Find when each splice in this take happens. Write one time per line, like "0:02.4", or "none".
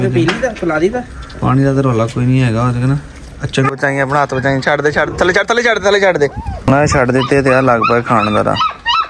0:03.7
0:06.5